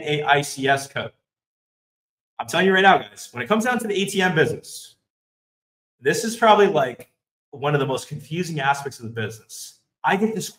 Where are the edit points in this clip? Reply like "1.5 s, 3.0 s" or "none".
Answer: none